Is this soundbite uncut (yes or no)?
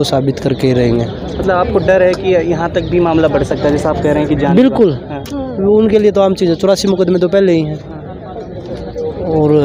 yes